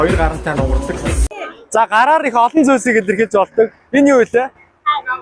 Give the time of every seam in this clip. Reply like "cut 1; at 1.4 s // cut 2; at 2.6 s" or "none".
cut 1; at 1.3 s